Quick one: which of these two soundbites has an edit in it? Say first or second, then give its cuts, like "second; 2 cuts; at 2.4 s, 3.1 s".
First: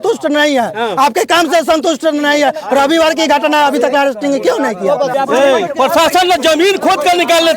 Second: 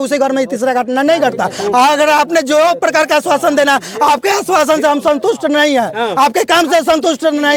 first; 1 cut; at 5.1 s